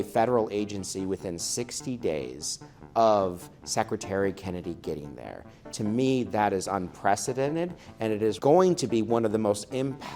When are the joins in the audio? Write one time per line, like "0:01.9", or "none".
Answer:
0:08.4